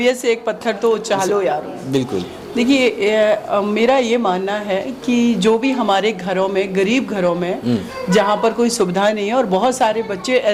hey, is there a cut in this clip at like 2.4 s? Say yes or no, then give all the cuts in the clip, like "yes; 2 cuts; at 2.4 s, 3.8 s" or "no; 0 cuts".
no; 0 cuts